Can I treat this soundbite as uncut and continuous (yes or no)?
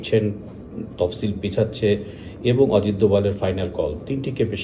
yes